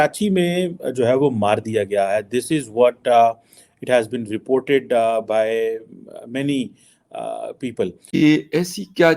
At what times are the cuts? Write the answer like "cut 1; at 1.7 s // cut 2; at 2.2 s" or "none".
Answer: cut 1; at 8.0 s